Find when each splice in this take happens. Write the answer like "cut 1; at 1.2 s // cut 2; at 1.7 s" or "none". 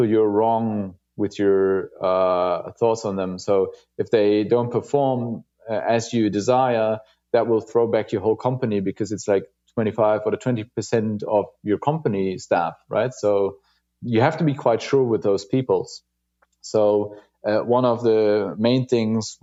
none